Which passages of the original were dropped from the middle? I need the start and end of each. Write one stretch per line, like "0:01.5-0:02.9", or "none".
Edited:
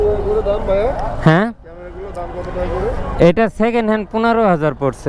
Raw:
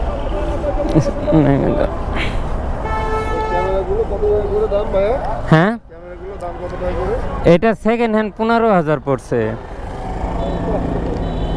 none